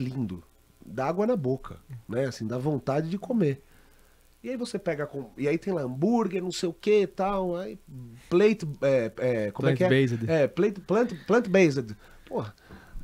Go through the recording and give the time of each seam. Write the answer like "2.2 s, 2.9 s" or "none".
none